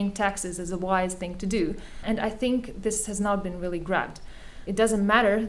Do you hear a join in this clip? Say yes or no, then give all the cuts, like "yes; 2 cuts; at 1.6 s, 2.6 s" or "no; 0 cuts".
yes; 2 cuts; at 2.0 s, 4.6 s